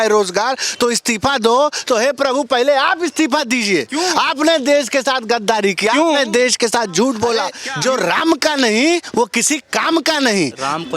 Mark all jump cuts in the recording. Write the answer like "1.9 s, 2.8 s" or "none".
7.6 s